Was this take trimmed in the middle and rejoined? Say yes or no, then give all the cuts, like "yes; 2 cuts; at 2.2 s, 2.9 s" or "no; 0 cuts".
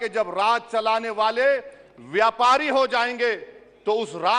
no; 0 cuts